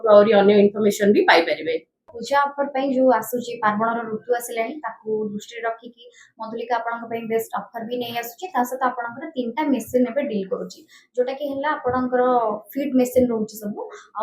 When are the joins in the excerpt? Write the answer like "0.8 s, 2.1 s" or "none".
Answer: 2.1 s